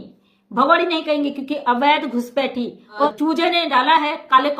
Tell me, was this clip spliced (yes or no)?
yes